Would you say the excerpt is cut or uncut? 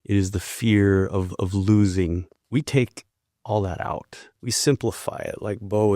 cut